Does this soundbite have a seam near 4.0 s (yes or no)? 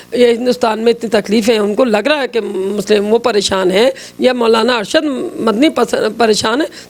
no